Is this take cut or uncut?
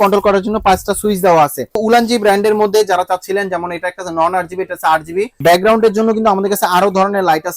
cut